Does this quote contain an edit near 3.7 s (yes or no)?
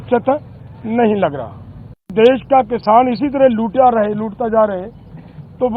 no